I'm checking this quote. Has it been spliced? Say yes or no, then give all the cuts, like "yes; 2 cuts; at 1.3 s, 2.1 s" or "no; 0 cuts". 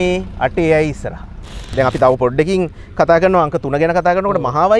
yes; 1 cut; at 1.7 s